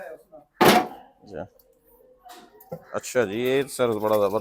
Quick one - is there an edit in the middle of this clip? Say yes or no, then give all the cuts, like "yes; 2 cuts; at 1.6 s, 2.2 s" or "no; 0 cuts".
no; 0 cuts